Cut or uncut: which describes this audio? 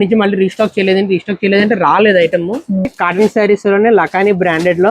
cut